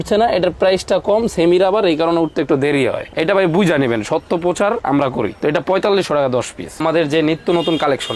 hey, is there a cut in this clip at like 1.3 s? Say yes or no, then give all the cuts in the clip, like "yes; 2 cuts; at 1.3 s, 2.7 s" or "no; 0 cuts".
no; 1 cut; at 6.8 s